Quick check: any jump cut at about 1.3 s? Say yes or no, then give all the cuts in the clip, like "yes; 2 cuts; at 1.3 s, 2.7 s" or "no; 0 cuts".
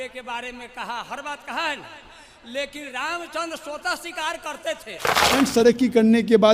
no; 1 cut; at 5.3 s